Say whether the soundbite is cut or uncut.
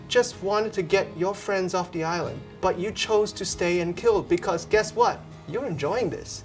cut